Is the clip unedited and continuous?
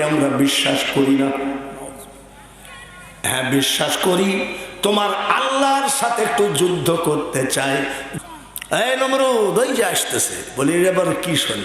no; 1 cut; at 8.1 s

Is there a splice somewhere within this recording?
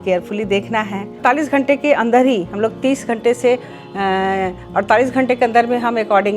yes; 1 cut; at 1.1 s

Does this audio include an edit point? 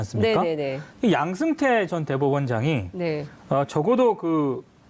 no; 0 cuts

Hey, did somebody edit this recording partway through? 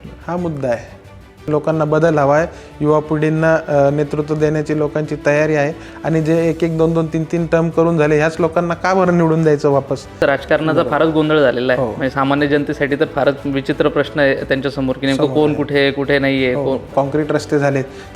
yes; 3 cuts; at 1.5 s, 10.2 s, 16.9 s

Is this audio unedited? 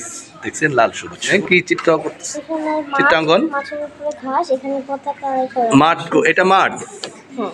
no; 1 cut; at 1.3 s

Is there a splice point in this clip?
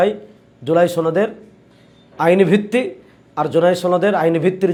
no; 0 cuts

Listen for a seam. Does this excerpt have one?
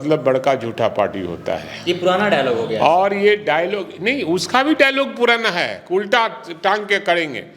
no; 0 cuts

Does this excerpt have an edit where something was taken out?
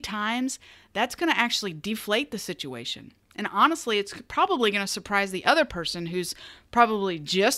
no; 0 cuts

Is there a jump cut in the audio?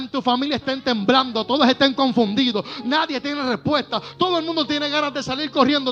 no; 0 cuts

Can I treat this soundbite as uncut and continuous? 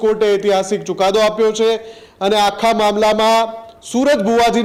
yes; 0 cuts

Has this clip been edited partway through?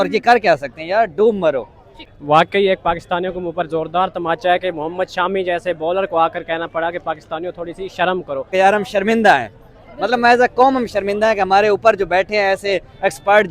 yes; 2 cuts; at 2.1 s, 8.5 s

